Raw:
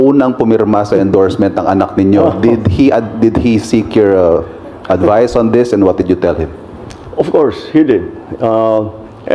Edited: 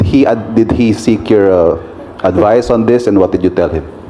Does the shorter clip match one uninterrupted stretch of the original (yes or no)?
yes